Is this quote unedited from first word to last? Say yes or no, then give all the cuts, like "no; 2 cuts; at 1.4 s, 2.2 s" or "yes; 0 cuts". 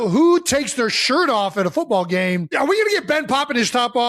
no; 1 cut; at 2.5 s